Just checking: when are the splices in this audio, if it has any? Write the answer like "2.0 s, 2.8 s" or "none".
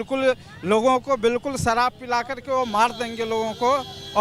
none

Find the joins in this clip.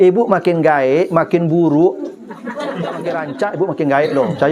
3.2 s

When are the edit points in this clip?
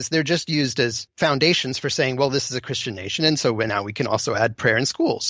1.0 s

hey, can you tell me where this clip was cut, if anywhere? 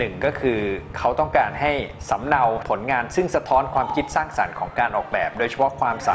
none

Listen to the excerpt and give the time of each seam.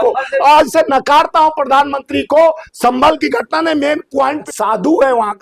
4.4 s

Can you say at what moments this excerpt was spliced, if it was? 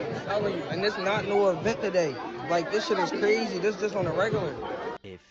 none

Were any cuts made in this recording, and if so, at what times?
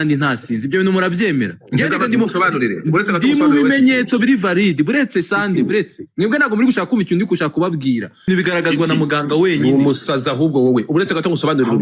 8.3 s

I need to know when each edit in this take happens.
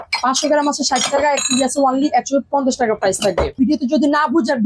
3.5 s

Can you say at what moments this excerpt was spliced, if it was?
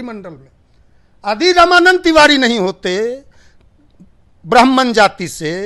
none

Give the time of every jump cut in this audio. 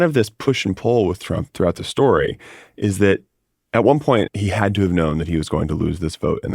1.5 s, 4.3 s

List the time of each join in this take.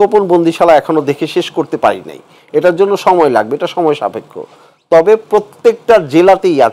none

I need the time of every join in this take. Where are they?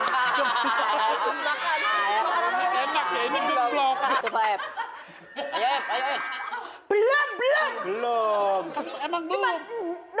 4.2 s

